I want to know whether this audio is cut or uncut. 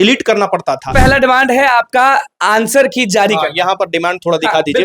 cut